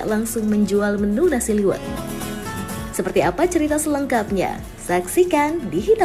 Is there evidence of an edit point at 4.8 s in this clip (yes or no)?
no